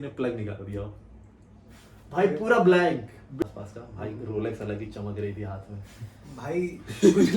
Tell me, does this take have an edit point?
yes; 1 cut; at 3.4 s

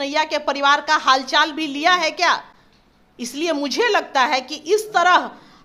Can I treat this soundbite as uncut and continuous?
yes; 0 cuts

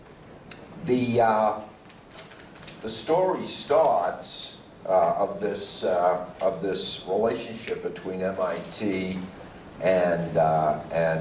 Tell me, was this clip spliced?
no; 0 cuts

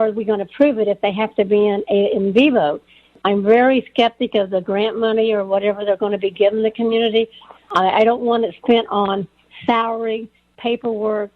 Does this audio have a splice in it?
no; 0 cuts

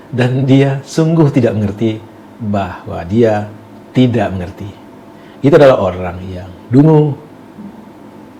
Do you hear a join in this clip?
no; 0 cuts

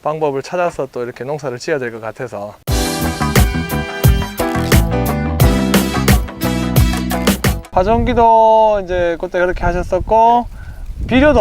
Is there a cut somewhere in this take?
yes; 2 cuts; at 2.5 s, 7.6 s

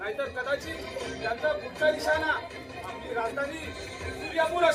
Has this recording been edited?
no; 0 cuts

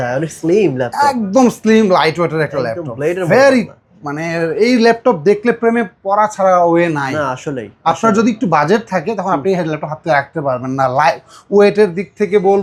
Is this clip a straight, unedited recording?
yes; 0 cuts

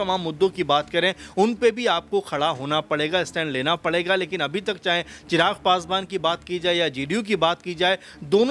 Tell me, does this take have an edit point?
no; 0 cuts

